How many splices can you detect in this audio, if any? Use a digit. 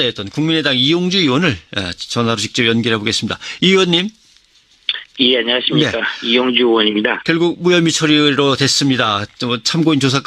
0